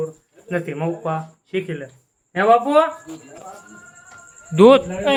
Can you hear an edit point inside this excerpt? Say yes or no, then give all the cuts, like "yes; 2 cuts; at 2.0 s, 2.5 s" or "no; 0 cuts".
no; 0 cuts